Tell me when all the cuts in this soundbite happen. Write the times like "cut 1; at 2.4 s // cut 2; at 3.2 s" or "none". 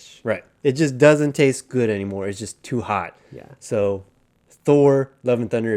none